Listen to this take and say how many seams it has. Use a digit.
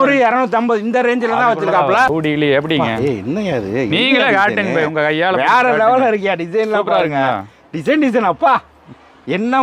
1